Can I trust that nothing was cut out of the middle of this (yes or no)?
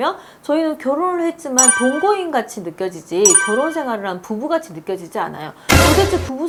yes